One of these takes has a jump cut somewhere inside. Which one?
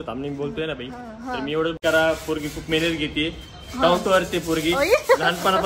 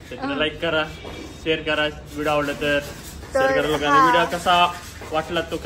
first; 1 cut; at 1.8 s

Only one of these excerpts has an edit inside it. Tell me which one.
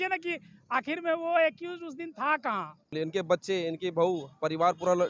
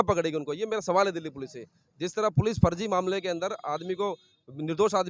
first; 1 cut; at 2.9 s

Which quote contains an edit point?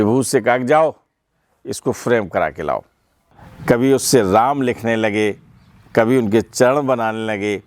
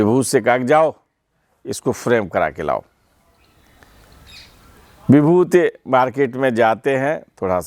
first; 1 cut; at 3.5 s

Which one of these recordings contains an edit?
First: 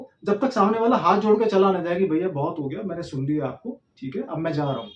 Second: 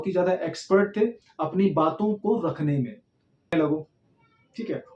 second; 1 cut; at 3.5 s

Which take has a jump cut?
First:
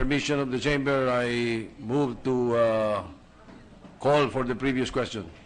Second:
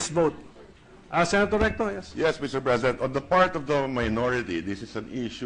second; 1 cut; at 1.7 s

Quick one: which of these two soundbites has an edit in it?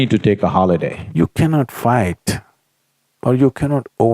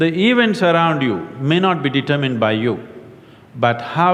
first; 1 cut; at 1.0 s

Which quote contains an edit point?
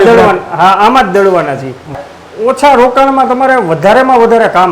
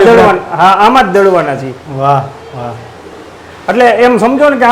first; 1 cut; at 2.0 s

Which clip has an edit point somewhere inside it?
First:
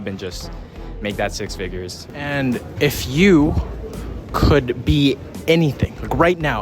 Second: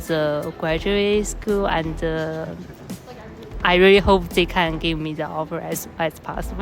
first; 1 cut; at 2.0 s

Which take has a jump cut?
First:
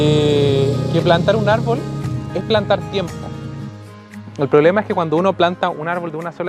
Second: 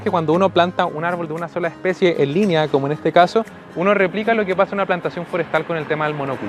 first; 1 cut; at 3.9 s

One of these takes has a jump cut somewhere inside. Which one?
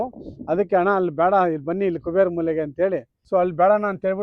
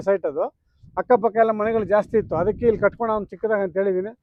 first; 1 cut; at 3.1 s

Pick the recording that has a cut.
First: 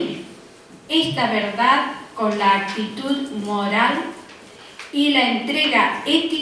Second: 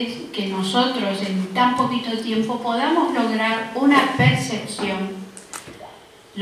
first; 1 cut; at 1.8 s

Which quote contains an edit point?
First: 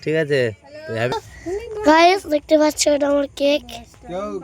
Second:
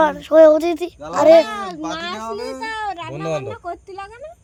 first; 1 cut; at 1.1 s

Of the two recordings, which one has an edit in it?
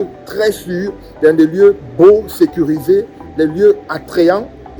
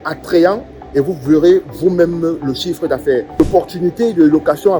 second; 1 cut; at 3.4 s

